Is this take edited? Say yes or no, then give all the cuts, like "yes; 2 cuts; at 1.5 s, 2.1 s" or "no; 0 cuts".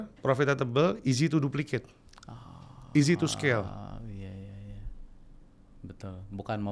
no; 0 cuts